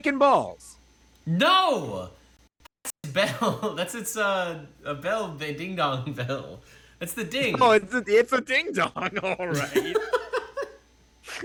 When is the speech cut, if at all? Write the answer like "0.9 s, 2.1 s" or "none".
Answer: none